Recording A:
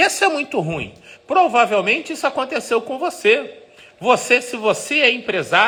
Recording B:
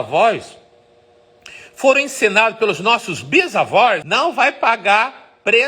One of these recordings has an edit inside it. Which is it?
B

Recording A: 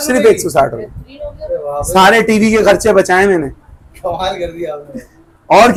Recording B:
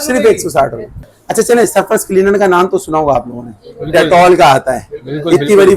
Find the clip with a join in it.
B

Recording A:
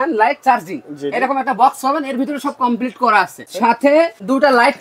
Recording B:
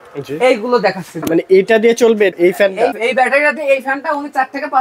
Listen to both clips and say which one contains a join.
B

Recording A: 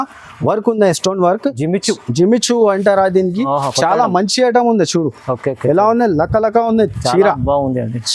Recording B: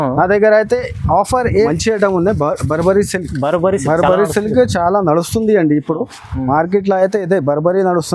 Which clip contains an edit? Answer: B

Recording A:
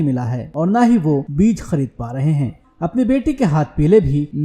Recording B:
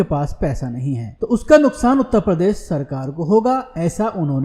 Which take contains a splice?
A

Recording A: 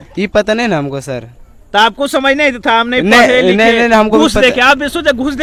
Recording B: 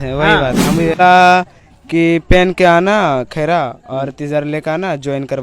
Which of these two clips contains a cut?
B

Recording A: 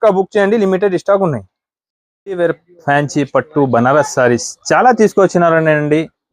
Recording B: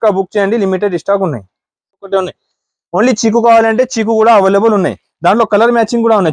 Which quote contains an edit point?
B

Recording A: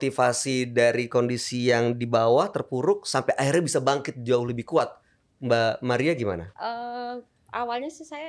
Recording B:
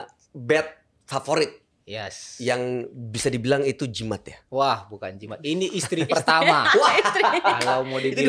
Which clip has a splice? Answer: A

